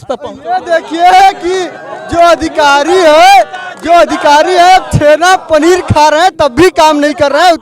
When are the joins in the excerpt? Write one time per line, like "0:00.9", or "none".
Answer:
none